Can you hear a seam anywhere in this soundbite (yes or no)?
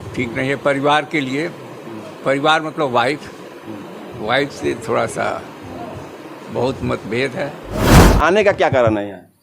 yes